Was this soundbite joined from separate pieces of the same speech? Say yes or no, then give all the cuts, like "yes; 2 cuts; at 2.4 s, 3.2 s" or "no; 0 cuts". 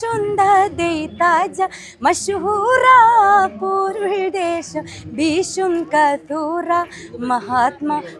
no; 0 cuts